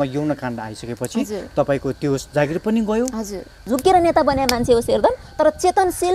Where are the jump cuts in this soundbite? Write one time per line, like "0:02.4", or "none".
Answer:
0:03.6